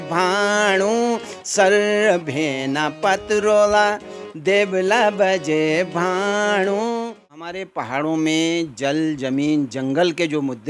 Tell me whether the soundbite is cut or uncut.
cut